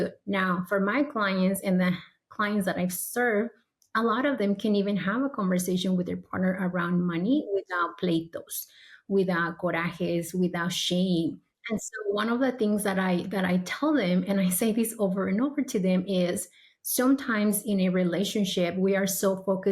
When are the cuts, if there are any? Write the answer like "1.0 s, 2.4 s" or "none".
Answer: 11.5 s